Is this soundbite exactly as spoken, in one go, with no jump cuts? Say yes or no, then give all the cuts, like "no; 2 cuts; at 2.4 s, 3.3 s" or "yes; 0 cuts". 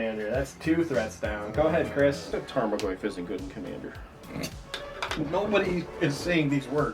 no; 1 cut; at 2.2 s